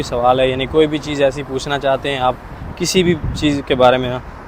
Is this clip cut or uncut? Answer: uncut